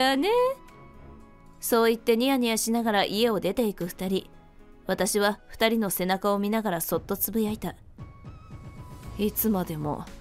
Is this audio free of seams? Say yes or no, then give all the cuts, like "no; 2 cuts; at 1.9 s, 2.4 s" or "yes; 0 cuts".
yes; 0 cuts